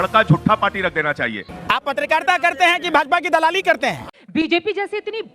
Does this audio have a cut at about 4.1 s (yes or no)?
yes